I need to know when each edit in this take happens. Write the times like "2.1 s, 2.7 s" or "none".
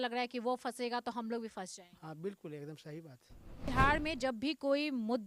3.7 s